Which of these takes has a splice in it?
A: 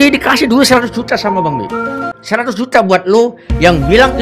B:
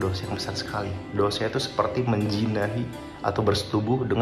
A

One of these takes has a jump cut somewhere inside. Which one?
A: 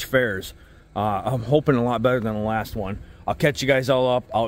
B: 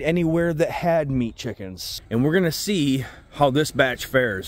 B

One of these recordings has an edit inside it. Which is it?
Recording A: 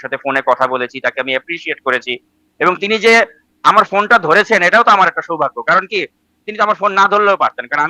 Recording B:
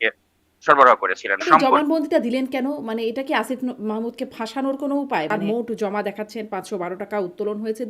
B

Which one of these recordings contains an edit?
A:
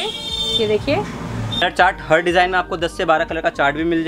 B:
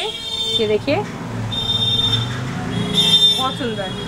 A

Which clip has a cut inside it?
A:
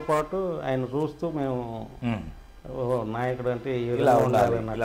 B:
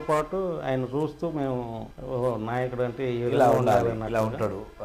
B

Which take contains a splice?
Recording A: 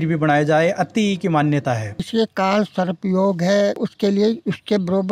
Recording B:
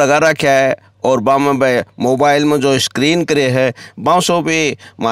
A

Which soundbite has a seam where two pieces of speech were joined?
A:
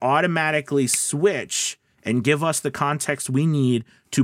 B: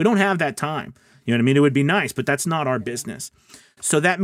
B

